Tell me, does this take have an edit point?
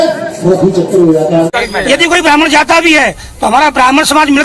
yes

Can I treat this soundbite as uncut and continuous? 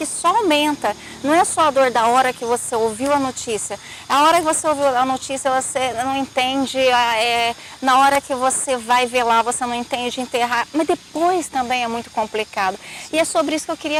yes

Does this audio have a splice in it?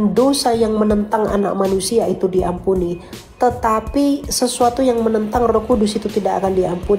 no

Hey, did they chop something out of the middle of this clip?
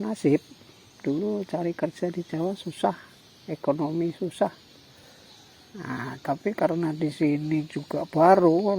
yes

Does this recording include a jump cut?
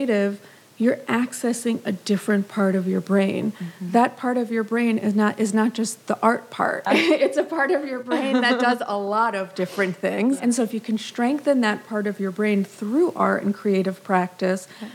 yes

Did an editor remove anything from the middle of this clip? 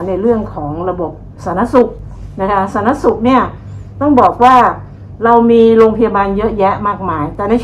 no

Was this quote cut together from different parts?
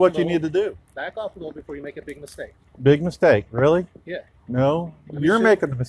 no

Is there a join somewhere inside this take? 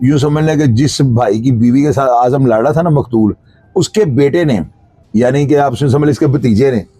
no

